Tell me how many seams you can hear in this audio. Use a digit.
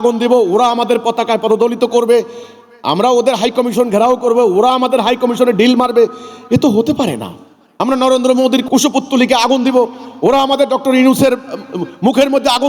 0